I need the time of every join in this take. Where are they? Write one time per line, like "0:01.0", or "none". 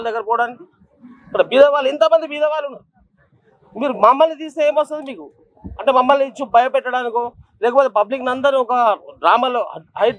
none